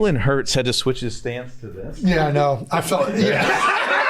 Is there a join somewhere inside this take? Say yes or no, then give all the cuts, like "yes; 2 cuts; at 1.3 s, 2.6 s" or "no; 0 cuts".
no; 0 cuts